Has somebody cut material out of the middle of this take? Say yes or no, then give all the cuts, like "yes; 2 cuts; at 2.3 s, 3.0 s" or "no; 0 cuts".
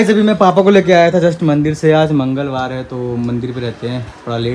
no; 0 cuts